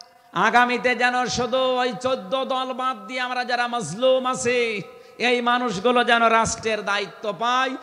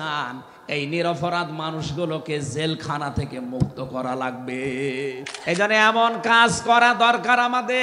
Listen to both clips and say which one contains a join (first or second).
second